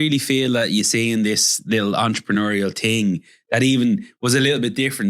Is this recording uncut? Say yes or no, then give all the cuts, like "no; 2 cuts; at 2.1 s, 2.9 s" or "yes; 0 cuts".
yes; 0 cuts